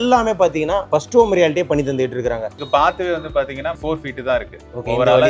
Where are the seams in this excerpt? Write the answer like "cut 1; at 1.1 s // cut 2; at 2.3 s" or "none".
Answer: cut 1; at 2.6 s